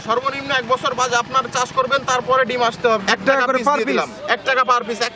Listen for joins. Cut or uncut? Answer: cut